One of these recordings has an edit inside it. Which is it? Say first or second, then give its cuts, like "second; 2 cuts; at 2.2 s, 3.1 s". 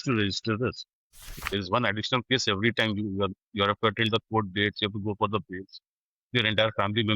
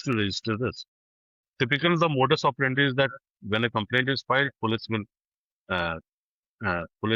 first; 1 cut; at 1.4 s